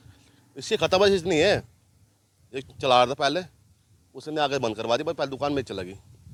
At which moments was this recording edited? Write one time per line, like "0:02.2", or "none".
none